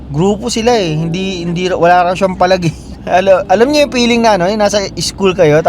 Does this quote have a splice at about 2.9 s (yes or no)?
yes